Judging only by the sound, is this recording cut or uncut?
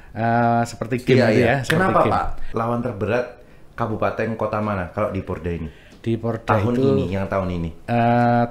cut